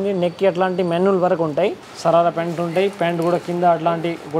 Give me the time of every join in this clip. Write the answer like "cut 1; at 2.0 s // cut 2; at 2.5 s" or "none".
cut 1; at 1.9 s